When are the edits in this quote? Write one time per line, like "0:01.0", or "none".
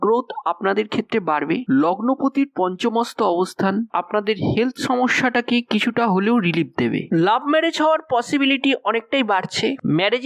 0:01.6
0:07.0

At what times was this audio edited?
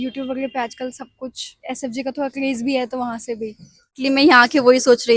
0:04.0

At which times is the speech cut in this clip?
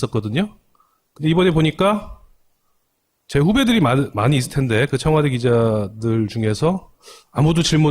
0:01.5

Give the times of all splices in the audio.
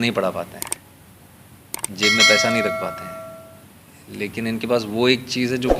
none

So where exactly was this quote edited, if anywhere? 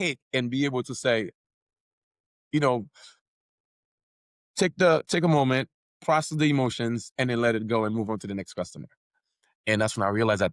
0:09.0

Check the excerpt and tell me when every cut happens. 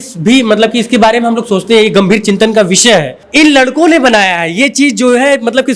0:03.2

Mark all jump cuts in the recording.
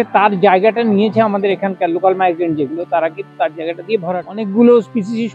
0:04.1

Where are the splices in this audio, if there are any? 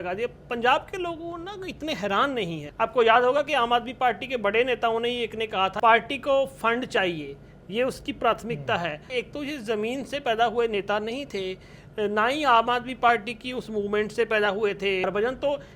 0:02.6
0:05.7
0:09.1
0:15.0

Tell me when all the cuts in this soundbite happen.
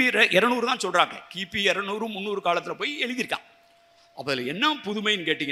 none

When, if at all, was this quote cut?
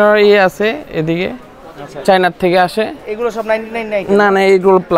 none

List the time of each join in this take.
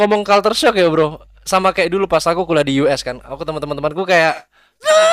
none

